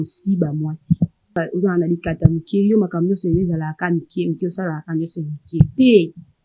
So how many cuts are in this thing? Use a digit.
1